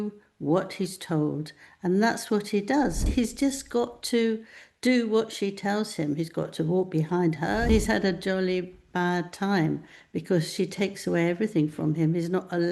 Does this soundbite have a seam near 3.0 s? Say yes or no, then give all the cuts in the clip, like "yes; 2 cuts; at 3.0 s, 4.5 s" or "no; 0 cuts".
yes; 2 cuts; at 3.0 s, 7.7 s